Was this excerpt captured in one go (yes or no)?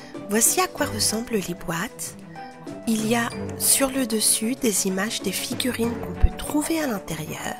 yes